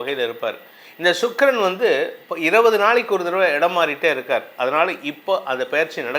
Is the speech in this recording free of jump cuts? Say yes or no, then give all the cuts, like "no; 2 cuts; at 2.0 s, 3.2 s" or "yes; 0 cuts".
yes; 0 cuts